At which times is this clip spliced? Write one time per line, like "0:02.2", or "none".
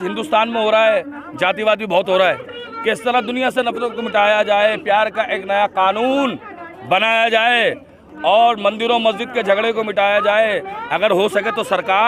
none